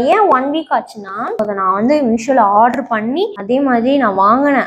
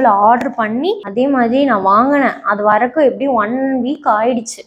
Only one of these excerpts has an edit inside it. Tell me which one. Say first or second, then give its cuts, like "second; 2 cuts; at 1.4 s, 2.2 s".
first; 1 cut; at 1.3 s